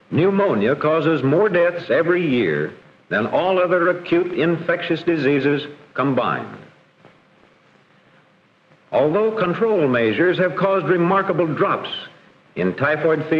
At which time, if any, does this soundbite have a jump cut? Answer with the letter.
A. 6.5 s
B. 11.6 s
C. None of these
A